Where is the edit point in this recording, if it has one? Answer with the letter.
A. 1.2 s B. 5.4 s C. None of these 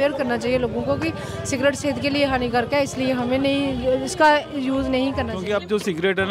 B